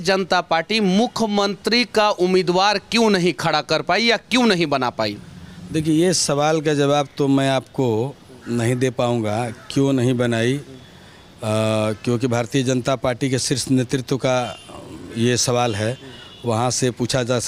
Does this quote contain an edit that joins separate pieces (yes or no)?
no